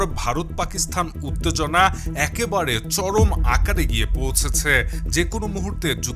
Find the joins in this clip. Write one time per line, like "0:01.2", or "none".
none